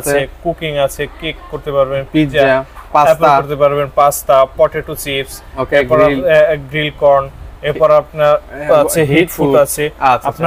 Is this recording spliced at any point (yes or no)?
no